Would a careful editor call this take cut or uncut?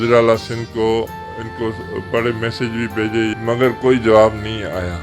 cut